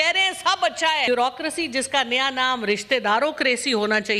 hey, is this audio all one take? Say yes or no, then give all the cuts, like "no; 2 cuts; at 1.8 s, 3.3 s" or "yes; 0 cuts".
no; 1 cut; at 1.1 s